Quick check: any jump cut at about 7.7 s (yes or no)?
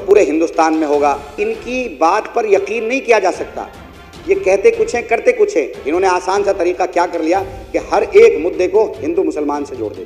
no